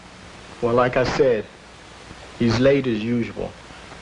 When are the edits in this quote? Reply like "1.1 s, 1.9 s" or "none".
2.4 s